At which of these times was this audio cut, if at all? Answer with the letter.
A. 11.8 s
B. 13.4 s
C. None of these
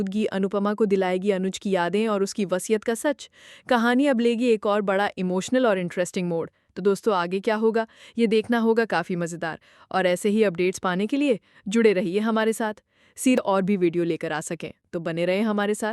B